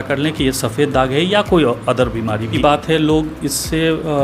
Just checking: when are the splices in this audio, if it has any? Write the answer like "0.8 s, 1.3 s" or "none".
2.5 s